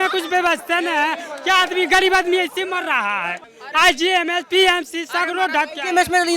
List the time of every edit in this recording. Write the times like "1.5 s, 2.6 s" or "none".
3.4 s